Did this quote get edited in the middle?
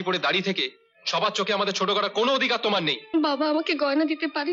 yes; 1 cut; at 3.0 s

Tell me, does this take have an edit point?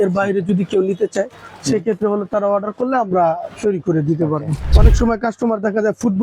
yes; 1 cut; at 4.7 s

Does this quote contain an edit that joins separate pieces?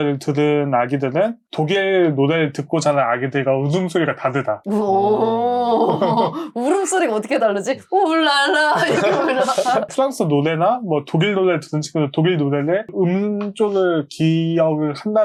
no; 0 cuts

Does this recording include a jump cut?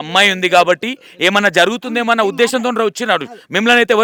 no; 0 cuts

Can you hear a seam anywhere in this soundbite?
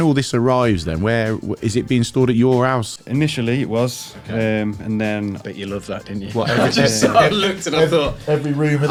no; 0 cuts

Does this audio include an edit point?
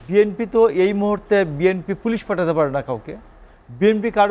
no; 0 cuts

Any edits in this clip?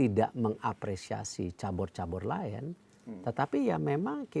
no; 0 cuts

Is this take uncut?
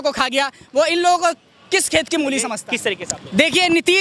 no; 1 cut; at 2.6 s

